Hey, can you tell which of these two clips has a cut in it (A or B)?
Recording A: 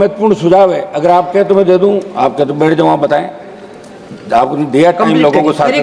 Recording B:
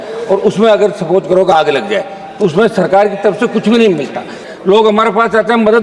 B